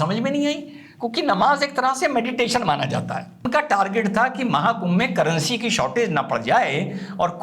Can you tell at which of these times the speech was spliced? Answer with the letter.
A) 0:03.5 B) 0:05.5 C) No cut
A